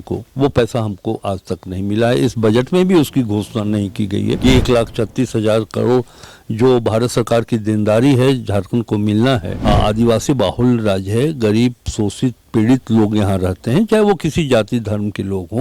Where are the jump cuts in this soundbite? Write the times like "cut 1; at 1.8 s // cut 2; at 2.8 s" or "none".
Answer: cut 1; at 4.4 s // cut 2; at 9.5 s